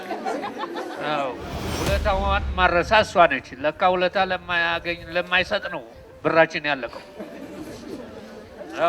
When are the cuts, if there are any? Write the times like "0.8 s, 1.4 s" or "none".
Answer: 1.6 s